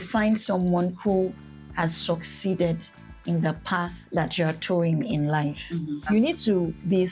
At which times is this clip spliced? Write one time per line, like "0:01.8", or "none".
0:06.0